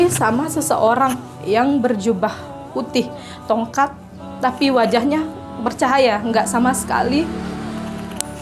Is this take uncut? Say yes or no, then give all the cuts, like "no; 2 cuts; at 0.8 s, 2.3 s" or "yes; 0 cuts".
yes; 0 cuts